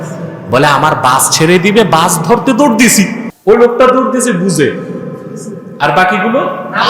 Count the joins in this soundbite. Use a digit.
1